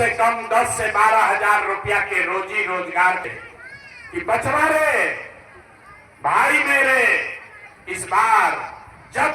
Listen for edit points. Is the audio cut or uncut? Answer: cut